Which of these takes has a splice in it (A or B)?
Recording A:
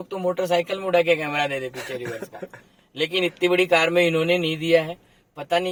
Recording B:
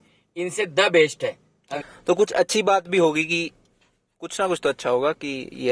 B